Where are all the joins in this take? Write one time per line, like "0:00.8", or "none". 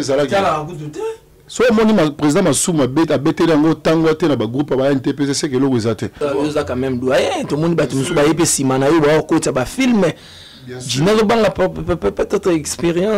0:06.1

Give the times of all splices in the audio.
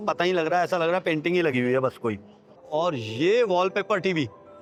none

